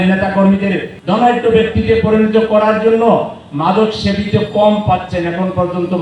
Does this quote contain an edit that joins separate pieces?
yes; 1 cut; at 0.9 s

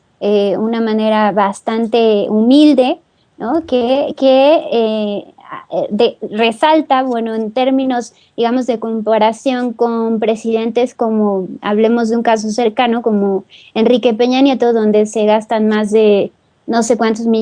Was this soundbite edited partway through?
yes; 1 cut; at 8.2 s

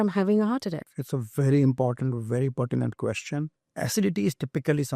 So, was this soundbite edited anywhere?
yes; 1 cut; at 3.6 s

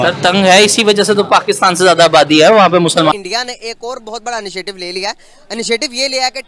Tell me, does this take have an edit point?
yes; 1 cut; at 3.1 s

